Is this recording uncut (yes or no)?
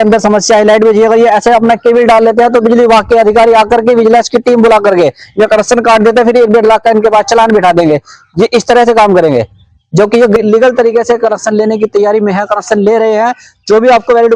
no